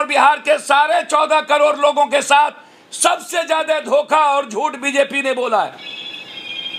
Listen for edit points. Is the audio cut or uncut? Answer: uncut